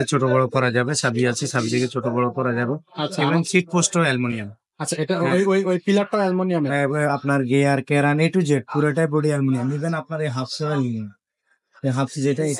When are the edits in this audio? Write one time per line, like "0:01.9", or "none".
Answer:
none

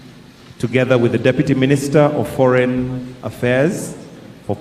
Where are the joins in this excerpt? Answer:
0:02.5

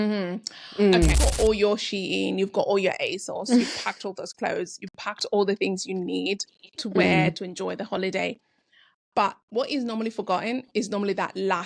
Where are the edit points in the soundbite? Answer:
0:01.2

